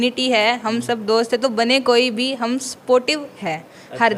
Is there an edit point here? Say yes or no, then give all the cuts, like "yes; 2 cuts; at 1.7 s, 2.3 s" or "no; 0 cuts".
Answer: no; 0 cuts